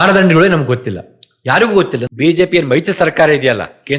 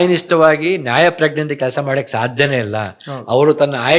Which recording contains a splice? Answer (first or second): first